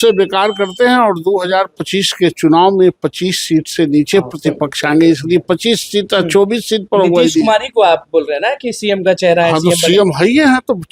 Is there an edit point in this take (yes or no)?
no